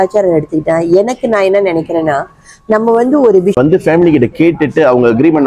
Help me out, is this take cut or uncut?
cut